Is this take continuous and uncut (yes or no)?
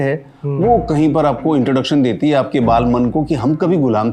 yes